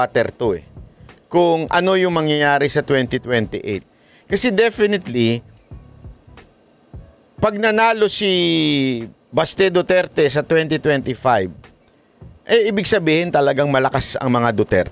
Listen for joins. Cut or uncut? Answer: uncut